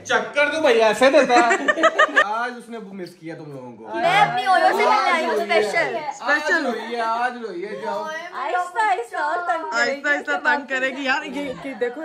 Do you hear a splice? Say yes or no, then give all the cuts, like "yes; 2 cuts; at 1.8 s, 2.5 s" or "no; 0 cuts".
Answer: yes; 1 cut; at 2.2 s